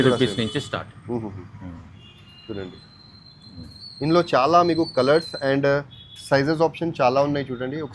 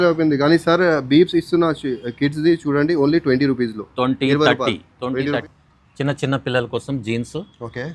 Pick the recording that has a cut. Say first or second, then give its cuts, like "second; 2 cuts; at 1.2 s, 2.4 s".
second; 1 cut; at 5.4 s